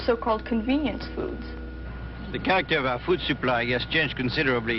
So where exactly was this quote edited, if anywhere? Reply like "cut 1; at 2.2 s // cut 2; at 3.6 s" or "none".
cut 1; at 1.0 s